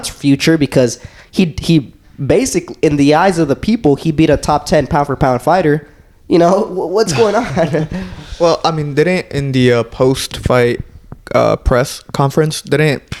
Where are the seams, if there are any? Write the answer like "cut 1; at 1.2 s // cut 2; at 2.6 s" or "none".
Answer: none